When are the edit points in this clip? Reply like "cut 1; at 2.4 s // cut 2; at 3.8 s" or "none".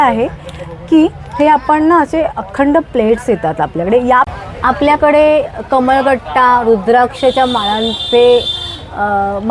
cut 1; at 4.3 s